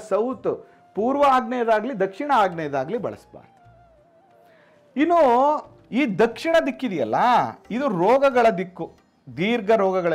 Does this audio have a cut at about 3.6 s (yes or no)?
no